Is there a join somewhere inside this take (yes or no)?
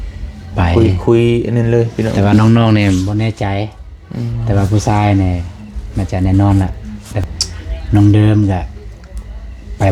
yes